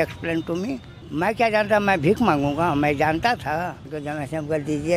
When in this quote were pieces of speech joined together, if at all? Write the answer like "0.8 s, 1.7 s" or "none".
1.0 s, 4.0 s